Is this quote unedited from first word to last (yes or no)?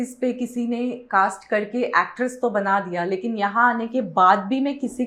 yes